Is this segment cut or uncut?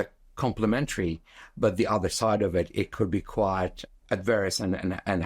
uncut